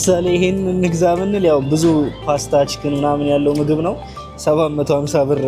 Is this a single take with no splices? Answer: yes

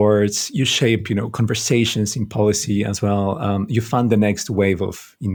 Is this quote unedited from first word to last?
yes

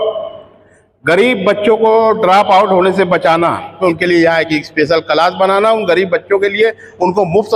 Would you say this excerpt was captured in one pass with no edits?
no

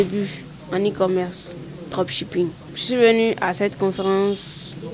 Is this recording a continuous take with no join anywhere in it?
no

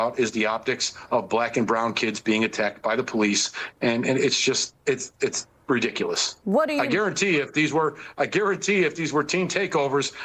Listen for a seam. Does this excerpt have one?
no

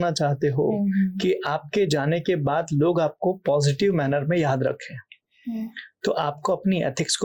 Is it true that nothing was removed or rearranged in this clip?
yes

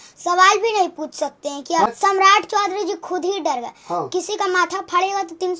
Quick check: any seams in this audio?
yes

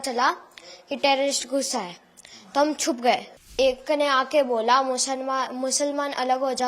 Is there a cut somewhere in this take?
yes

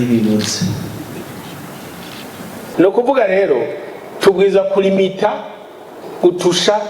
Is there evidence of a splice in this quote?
yes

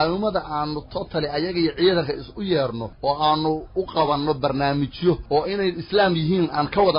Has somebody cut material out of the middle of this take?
yes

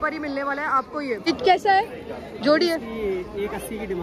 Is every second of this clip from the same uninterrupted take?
no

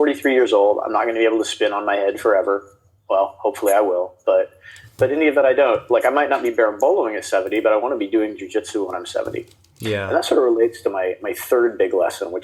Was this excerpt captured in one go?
yes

